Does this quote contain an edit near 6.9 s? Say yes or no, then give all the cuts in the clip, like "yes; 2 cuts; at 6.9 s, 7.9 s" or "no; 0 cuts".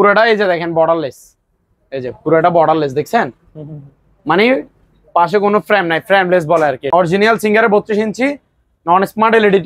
yes; 1 cut; at 6.9 s